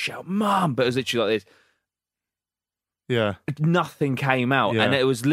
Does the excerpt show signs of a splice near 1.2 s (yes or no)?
no